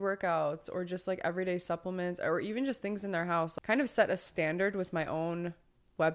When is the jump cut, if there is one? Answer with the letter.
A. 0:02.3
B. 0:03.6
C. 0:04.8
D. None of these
B